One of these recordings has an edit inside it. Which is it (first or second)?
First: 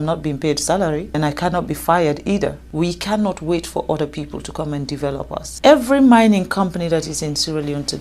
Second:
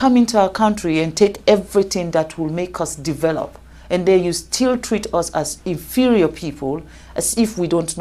first